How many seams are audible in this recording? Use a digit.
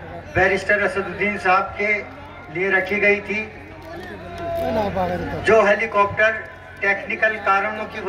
0